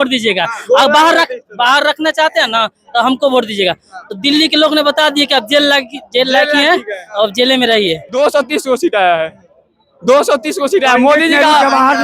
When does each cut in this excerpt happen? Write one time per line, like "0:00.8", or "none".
0:08.0